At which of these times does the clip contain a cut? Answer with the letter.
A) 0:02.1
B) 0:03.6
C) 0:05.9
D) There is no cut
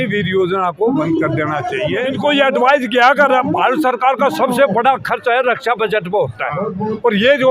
A